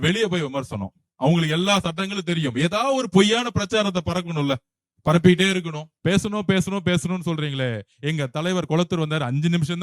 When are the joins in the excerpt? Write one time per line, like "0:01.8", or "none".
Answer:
0:05.9

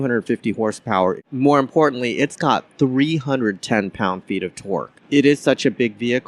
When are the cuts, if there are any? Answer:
0:01.2
0:04.9

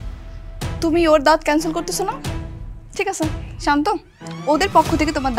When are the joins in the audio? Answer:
none

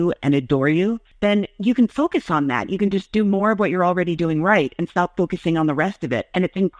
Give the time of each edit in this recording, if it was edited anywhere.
0:01.1

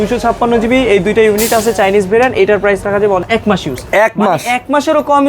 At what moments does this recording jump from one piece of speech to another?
0:03.2

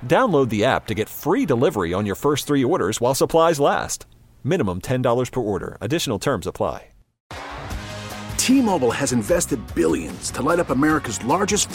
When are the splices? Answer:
0:07.2

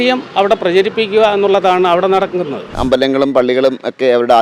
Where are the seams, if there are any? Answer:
0:02.8

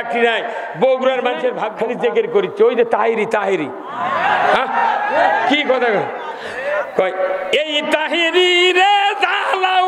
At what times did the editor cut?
0:01.7

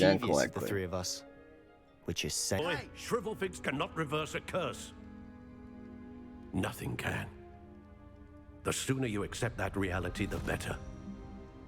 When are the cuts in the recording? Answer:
0:02.6

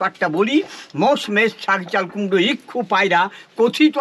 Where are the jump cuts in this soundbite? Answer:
none

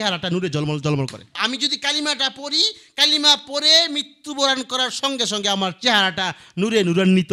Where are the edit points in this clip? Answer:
0:01.4

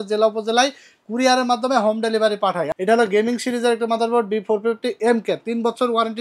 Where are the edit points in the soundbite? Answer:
0:02.7

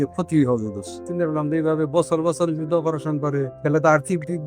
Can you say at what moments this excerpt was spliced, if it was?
0:01.0
0:03.5

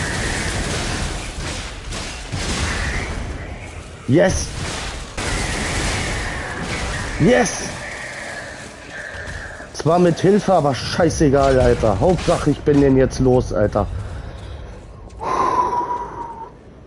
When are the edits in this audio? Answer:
0:05.2

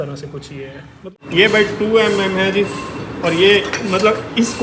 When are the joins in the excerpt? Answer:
0:01.1

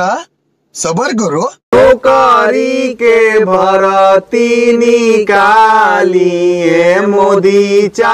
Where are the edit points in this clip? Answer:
0:01.6

